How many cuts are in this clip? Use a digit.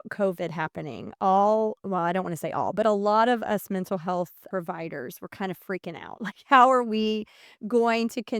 1